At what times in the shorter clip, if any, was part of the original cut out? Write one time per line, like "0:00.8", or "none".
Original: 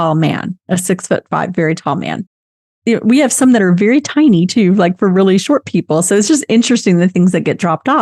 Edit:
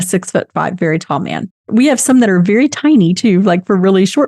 0:01.7